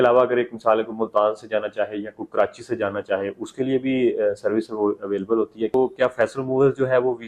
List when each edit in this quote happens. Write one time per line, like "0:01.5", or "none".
0:05.7